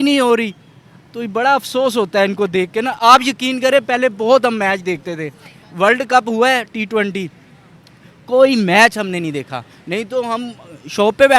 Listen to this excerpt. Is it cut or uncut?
uncut